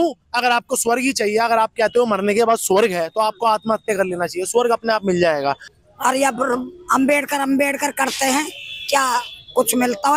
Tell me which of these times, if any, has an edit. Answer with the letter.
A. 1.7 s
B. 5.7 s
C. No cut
B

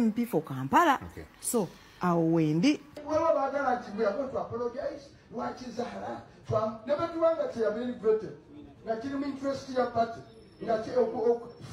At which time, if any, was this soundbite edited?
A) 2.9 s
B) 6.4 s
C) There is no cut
A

